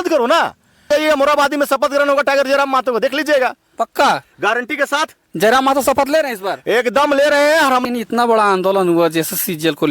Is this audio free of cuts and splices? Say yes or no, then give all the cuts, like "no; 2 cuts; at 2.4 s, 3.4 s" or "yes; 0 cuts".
no; 2 cuts; at 0.9 s, 7.8 s